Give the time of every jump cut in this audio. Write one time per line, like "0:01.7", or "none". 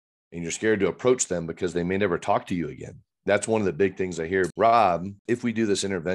0:04.5
0:05.1